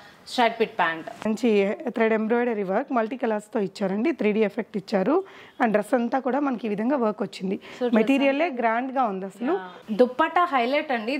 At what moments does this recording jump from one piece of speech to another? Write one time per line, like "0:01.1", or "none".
0:01.3
0:09.8